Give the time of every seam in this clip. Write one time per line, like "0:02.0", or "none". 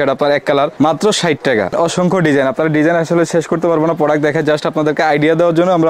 0:01.7